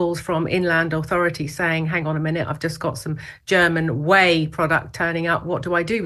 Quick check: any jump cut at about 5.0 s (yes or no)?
no